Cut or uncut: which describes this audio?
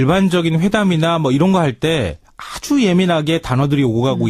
cut